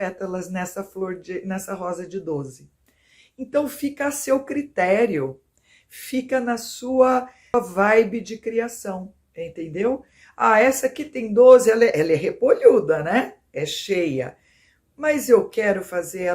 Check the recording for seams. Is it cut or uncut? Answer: cut